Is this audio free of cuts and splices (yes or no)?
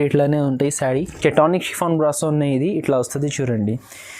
no